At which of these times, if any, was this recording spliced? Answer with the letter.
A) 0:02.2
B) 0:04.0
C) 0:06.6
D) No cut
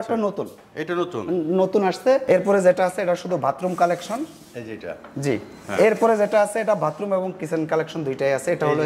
A